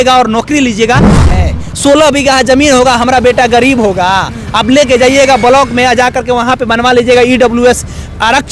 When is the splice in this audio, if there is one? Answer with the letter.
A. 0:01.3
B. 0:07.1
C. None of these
A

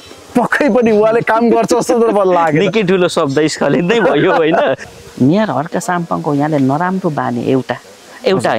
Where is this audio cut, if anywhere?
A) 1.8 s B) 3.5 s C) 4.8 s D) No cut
C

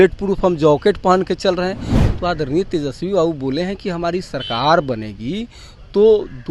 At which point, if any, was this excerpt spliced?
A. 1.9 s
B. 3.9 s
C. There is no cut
A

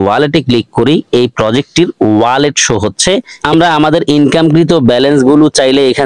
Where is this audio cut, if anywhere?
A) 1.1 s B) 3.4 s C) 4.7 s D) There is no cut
B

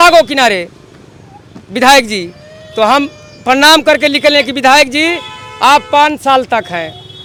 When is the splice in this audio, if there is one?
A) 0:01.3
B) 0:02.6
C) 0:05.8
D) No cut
D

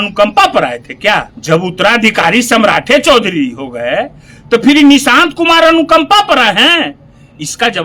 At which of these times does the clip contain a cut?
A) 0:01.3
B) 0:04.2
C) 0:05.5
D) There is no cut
A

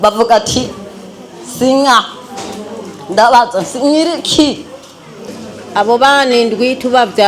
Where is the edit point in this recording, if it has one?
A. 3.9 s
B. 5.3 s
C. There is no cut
B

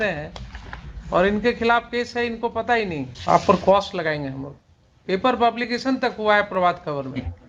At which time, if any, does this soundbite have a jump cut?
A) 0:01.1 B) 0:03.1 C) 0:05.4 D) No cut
B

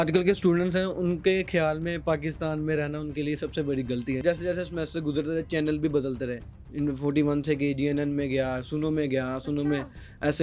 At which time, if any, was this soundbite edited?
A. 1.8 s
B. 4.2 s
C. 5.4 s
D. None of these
B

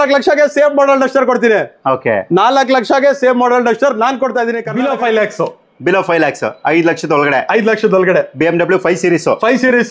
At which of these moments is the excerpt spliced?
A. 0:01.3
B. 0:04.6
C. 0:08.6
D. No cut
B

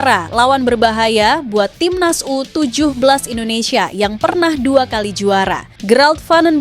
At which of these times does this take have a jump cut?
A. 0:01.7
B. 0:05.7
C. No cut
B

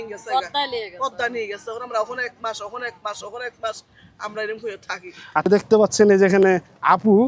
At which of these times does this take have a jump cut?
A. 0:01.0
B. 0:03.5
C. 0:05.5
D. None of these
C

